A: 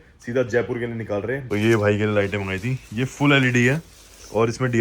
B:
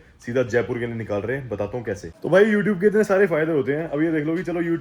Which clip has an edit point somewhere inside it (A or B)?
A